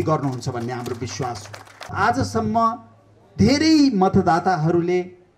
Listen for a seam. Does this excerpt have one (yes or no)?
yes